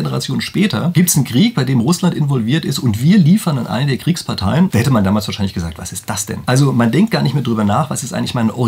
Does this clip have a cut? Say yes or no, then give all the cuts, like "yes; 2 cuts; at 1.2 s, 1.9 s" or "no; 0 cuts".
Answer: yes; 3 cuts; at 0.9 s, 4.7 s, 6.3 s